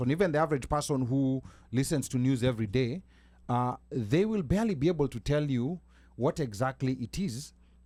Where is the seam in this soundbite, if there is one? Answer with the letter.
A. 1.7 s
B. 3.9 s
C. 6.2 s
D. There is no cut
D